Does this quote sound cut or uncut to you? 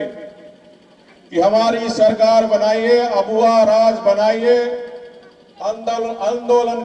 uncut